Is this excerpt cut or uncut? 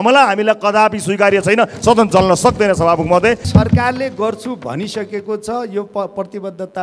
cut